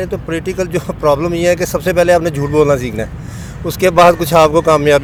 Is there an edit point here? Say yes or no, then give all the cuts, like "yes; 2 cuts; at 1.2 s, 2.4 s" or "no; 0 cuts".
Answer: no; 0 cuts